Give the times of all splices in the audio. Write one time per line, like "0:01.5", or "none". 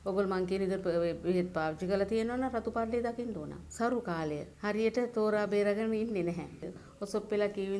0:03.7
0:06.6